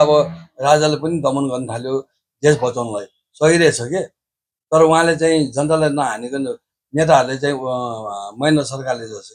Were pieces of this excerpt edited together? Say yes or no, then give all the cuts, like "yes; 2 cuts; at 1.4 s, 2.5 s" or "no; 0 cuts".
no; 0 cuts